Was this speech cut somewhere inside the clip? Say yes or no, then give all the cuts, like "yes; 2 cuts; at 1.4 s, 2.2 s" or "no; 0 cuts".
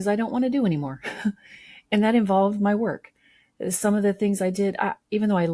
no; 0 cuts